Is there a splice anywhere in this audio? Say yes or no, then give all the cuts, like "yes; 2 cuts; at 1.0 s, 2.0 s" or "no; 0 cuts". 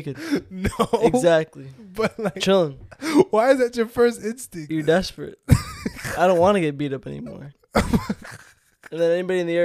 yes; 2 cuts; at 4.7 s, 7.6 s